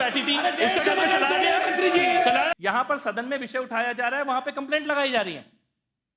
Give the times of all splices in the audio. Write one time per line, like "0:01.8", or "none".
0:02.5